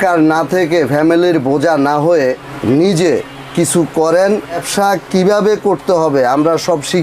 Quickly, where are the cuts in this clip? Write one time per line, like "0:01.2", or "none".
0:02.5
0:04.6